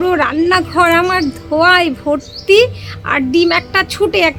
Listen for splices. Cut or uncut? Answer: uncut